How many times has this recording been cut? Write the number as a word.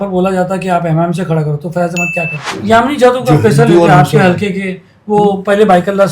one